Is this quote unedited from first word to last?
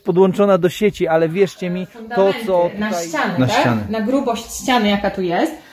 no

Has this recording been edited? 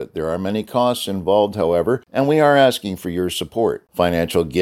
yes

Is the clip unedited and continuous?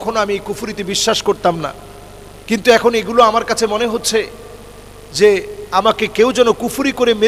yes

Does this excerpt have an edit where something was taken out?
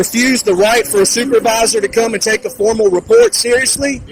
no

